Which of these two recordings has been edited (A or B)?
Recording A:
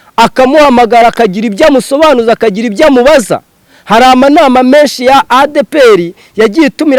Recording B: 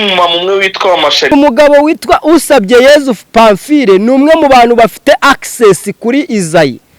B